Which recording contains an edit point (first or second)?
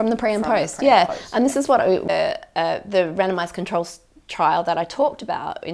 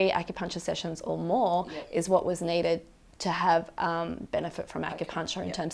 first